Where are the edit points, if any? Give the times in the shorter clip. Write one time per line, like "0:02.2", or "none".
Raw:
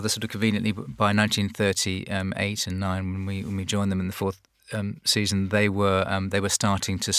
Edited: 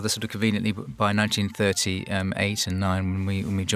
none